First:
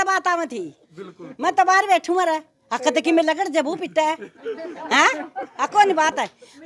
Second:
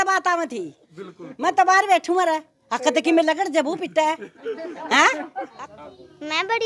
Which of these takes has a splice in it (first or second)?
second